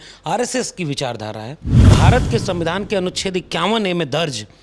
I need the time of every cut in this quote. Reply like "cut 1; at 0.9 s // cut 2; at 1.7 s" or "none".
cut 1; at 1.8 s